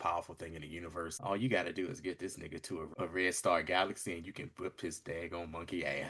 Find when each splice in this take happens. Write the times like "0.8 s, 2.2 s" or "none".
1.1 s, 2.9 s